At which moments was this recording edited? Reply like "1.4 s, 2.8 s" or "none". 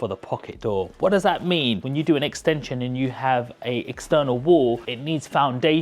1.8 s, 4.9 s